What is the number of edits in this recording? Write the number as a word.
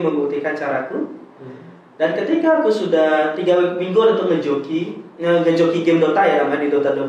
zero